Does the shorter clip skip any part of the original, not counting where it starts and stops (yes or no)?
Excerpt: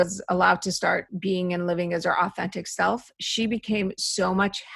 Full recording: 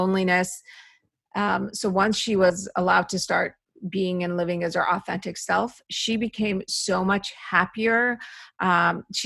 yes